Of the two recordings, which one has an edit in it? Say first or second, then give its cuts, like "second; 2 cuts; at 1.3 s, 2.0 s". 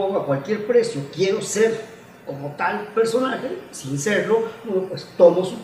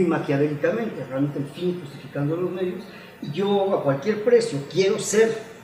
second; 1 cut; at 2.3 s